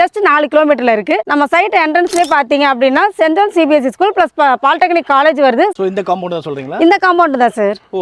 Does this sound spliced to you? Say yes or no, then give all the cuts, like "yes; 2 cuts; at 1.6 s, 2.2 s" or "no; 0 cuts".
yes; 2 cuts; at 1.3 s, 5.8 s